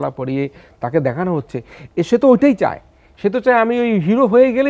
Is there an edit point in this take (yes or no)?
no